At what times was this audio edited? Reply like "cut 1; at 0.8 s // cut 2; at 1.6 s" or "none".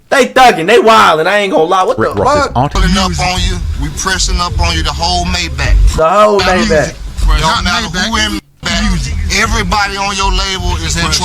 cut 1; at 2.8 s